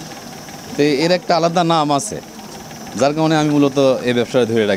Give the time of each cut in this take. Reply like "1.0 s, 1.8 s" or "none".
none